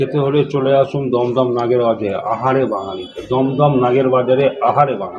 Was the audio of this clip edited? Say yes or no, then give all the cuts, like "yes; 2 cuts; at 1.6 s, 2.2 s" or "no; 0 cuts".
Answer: no; 0 cuts